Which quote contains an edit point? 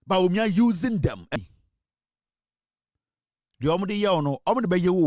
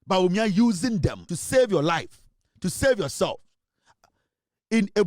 second; 1 cut; at 1.3 s

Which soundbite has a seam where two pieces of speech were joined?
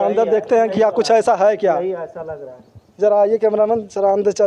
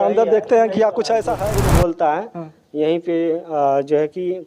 second; 1 cut; at 1.4 s

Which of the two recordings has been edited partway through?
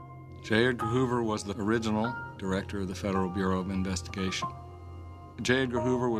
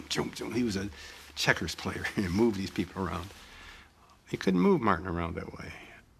first; 1 cut; at 3.2 s

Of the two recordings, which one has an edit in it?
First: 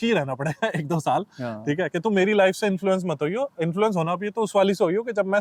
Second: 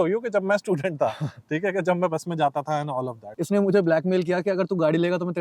second; 1 cut; at 3.3 s

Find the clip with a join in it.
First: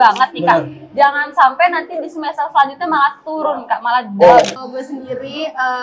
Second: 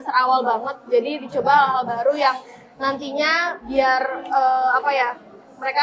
first; 1 cut; at 4.6 s

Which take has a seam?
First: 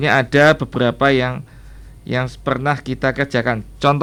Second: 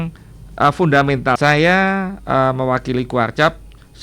second; 1 cut; at 1.4 s

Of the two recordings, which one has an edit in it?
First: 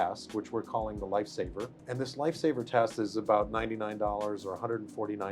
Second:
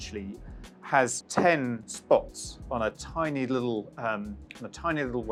first; 1 cut; at 1.8 s

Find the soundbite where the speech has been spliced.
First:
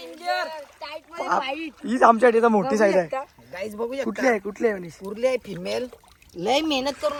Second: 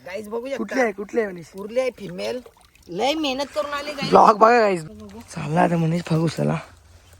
second; 1 cut; at 4.8 s

